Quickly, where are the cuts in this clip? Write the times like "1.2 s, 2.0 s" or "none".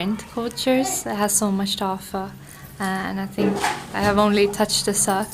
none